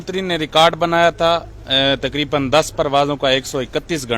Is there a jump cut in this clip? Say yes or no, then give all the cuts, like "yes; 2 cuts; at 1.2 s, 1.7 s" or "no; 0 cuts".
no; 0 cuts